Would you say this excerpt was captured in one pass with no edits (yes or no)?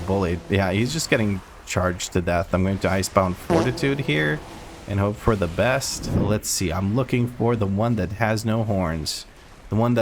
no